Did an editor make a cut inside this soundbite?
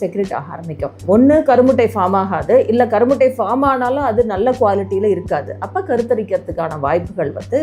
yes; 1 cut; at 1.0 s

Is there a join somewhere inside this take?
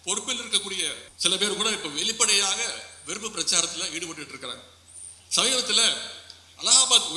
yes; 1 cut; at 1.1 s

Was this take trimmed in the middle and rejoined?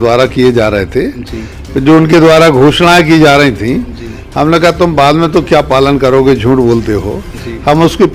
no; 0 cuts

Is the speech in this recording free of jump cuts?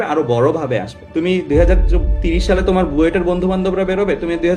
no; 1 cut; at 1.0 s

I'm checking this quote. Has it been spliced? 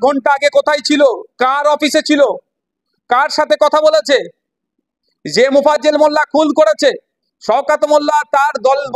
no; 0 cuts

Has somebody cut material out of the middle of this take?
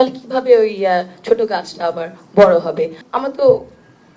yes; 1 cut; at 3.0 s

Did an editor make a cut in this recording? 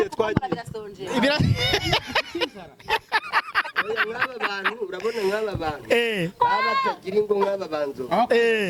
no; 0 cuts

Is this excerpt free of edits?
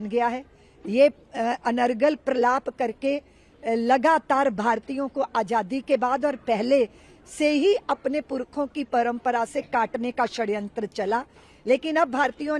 yes; 0 cuts

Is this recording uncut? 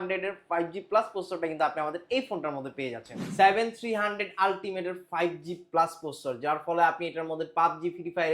no; 1 cut; at 3.2 s

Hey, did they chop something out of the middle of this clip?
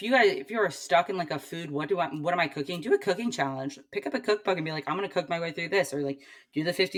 no; 0 cuts

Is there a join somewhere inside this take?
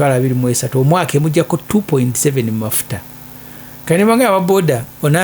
no; 0 cuts

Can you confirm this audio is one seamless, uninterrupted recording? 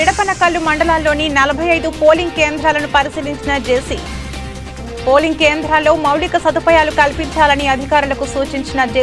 yes; 0 cuts

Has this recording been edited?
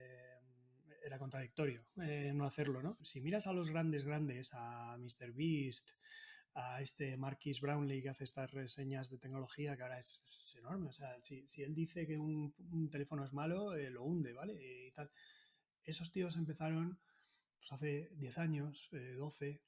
yes; 1 cut; at 3.1 s

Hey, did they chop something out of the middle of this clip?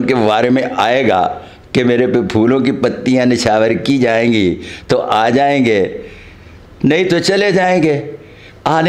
no; 0 cuts

